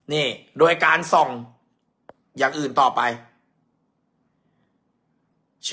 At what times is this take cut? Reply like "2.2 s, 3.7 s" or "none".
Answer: none